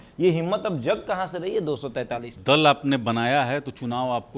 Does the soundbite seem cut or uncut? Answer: cut